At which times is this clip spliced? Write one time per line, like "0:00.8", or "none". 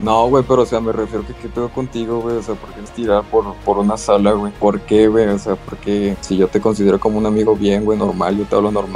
0:04.5
0:06.2